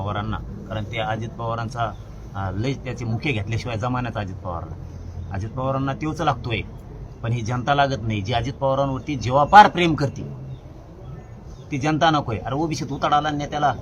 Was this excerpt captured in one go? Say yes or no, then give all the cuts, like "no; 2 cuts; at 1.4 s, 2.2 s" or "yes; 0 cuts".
yes; 0 cuts